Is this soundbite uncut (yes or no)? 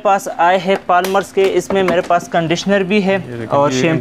yes